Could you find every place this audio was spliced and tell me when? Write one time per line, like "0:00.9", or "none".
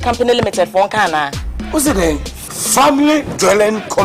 none